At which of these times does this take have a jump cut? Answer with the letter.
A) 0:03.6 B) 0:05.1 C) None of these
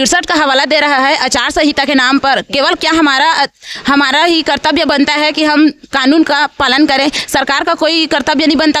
C